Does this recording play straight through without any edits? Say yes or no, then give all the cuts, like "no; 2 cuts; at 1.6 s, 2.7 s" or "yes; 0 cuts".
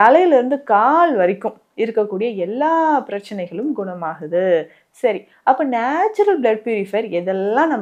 yes; 0 cuts